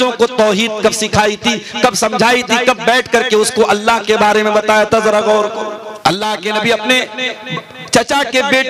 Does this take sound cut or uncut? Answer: cut